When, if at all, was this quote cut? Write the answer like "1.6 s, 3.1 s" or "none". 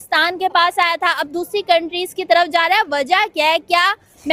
none